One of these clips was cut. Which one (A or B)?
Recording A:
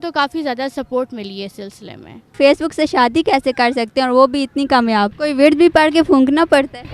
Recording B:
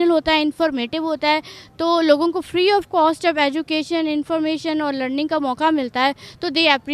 A